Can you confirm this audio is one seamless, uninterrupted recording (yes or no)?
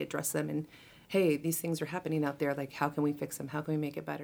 yes